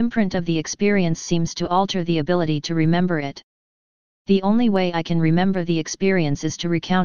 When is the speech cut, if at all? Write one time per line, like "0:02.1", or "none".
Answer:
none